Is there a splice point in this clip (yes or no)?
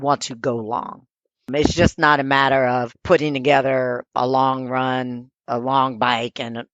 yes